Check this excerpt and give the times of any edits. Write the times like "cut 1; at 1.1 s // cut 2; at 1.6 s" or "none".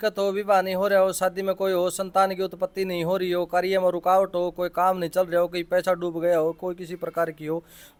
none